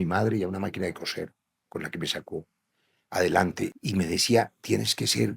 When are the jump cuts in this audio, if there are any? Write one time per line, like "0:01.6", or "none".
0:03.7